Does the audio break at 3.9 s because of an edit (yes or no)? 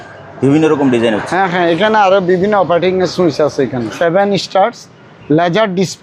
yes